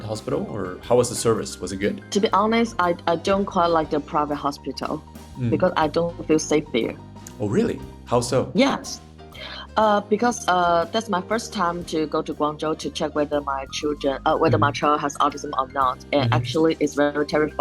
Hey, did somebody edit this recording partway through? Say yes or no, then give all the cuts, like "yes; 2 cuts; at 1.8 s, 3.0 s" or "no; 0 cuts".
no; 0 cuts